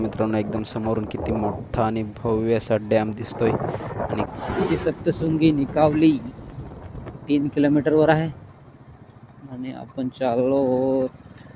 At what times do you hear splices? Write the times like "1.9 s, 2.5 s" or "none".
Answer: 4.3 s